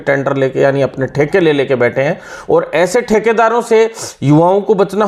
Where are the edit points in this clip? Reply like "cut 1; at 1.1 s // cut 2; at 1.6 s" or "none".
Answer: none